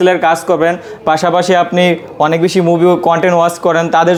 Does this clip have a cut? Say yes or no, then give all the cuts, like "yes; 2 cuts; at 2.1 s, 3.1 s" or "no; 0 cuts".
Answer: no; 0 cuts